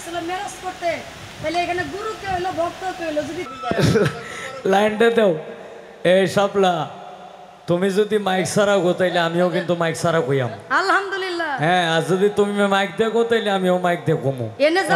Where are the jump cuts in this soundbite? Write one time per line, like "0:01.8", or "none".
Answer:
0:03.5